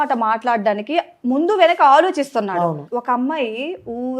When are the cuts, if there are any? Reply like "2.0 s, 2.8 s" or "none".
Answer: 2.5 s

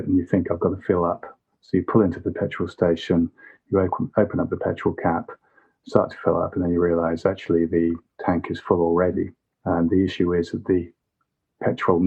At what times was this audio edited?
none

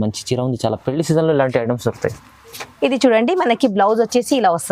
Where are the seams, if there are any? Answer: none

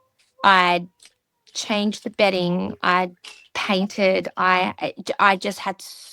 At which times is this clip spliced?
none

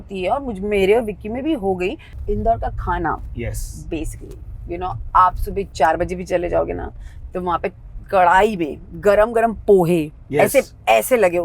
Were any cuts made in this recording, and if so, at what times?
2.1 s

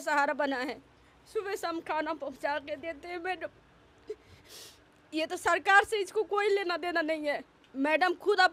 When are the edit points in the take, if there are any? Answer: none

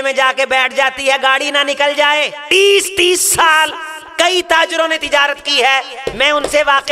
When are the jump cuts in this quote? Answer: 2.4 s

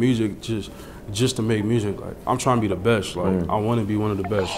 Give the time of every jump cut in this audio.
none

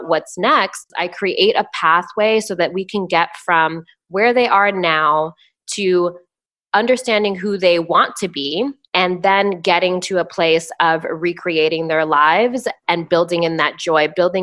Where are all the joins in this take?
1.0 s, 8.8 s

